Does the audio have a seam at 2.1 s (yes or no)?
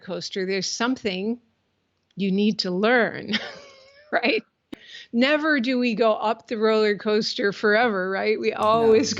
no